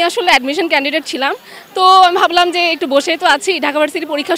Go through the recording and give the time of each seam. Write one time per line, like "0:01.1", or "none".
none